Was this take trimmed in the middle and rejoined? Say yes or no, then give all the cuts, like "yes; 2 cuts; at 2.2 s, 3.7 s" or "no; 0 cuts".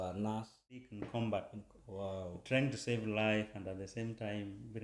yes; 1 cut; at 1.0 s